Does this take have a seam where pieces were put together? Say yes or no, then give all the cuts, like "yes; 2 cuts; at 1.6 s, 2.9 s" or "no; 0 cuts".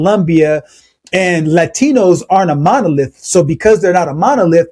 no; 0 cuts